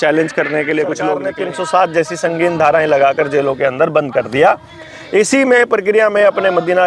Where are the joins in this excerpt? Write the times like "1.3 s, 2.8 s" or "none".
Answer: 1.2 s

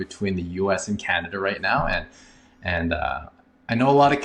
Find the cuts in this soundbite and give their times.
none

